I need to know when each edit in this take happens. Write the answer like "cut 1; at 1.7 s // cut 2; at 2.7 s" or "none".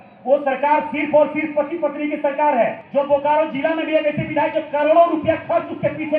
cut 1; at 2.8 s